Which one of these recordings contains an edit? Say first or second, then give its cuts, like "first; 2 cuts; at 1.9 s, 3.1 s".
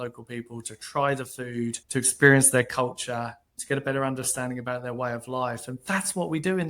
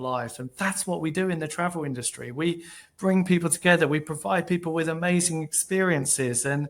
first; 1 cut; at 1.8 s